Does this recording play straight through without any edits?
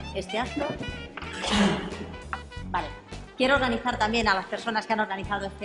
yes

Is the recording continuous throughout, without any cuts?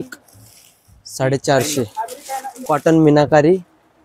no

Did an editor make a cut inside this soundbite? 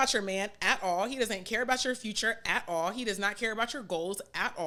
no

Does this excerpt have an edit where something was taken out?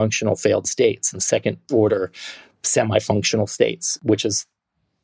yes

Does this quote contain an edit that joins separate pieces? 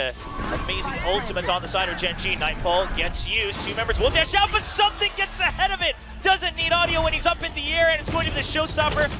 no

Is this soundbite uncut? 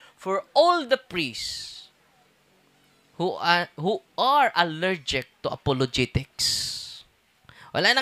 yes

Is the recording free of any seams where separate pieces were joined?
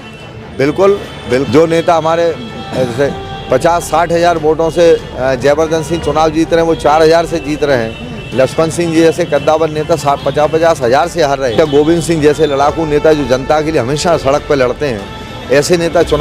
no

